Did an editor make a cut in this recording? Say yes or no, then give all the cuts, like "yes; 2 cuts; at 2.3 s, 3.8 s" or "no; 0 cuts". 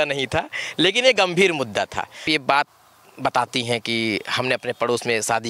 yes; 1 cut; at 2.2 s